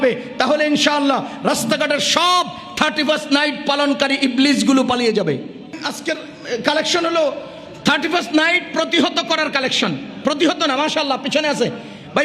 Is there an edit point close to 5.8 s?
yes; 1 cut; at 5.8 s

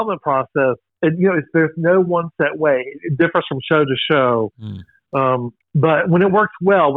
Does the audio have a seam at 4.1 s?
no; 2 cuts; at 0.9 s, 5.6 s

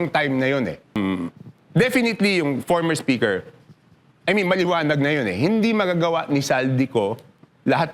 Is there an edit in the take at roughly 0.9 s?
yes; 1 cut; at 0.9 s

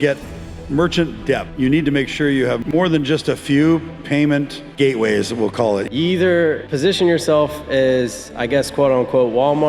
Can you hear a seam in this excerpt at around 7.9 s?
no; 5 cuts; at 1.5 s, 2.6 s, 4.6 s, 5.9 s, 6.7 s

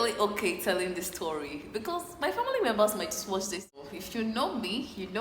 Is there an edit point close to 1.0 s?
no; 1 cut; at 3.7 s

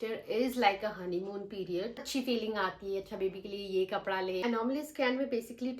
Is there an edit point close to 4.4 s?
yes; 2 cuts; at 2.1 s, 4.4 s

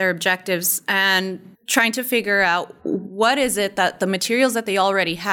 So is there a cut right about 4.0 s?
no; 2 cuts; at 1.5 s, 2.7 s

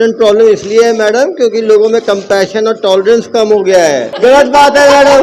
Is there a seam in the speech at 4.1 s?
yes; 1 cut; at 4.1 s

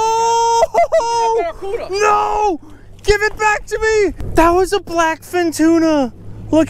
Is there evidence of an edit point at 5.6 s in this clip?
no; 1 cut; at 4.2 s

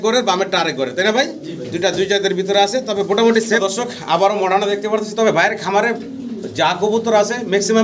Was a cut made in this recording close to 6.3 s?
no; 1 cut; at 3.6 s

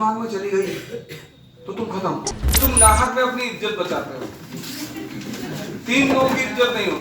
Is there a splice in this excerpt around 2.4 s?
yes; 1 cut; at 2.4 s

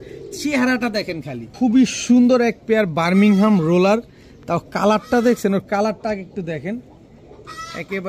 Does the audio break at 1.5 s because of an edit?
yes; 1 cut; at 1.5 s

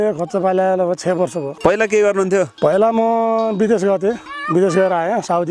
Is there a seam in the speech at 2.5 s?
yes; 3 cuts; at 1.5 s, 2.5 s, 4.3 s

